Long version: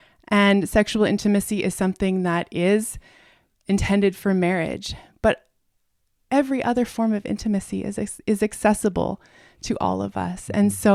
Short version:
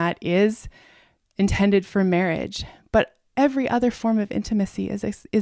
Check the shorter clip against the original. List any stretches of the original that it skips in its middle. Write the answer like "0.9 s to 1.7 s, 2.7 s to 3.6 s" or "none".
5.5 s to 6.1 s